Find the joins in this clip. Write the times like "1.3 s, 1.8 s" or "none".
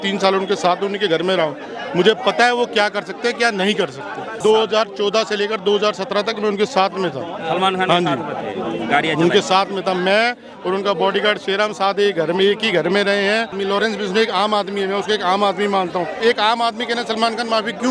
4.3 s, 13.5 s, 16.2 s